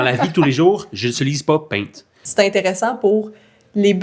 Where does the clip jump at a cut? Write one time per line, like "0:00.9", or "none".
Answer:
0:02.2